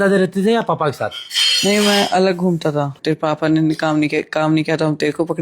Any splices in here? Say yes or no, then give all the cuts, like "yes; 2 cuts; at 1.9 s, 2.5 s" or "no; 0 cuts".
yes; 1 cut; at 2.9 s